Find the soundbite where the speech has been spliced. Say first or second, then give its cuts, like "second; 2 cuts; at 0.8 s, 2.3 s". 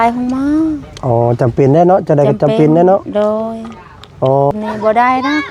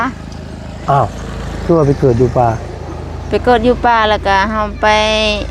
first; 1 cut; at 4.5 s